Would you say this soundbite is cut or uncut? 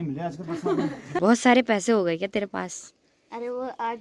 cut